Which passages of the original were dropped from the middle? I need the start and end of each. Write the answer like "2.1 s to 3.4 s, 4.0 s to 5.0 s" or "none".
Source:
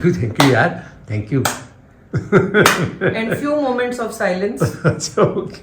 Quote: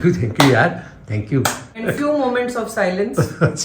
1.8 s to 3.3 s

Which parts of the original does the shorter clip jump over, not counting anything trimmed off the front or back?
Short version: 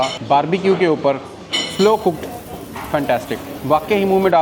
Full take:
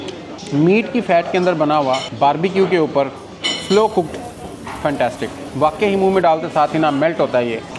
none

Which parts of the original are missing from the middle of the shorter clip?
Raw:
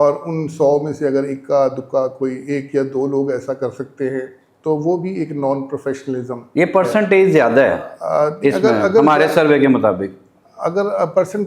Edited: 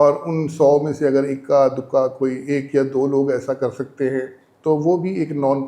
none

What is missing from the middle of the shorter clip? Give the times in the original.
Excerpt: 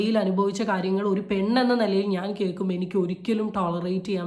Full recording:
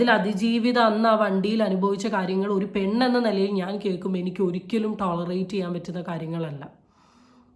none

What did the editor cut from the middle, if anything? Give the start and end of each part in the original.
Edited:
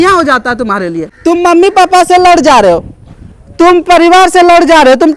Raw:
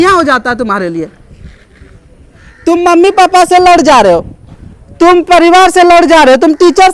1.1 s to 2.5 s

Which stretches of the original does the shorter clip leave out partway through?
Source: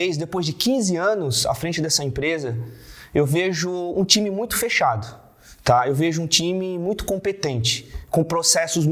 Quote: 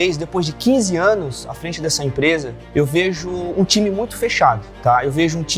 2.6 s to 3.0 s, 5.1 s to 5.5 s

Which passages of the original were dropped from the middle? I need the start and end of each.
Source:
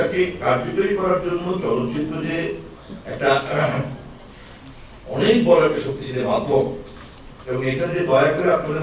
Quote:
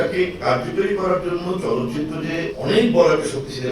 2.5 s to 5.1 s

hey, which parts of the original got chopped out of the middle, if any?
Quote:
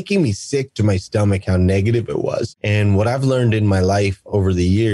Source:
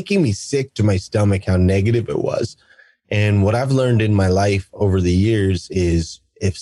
2.6 s to 3.0 s

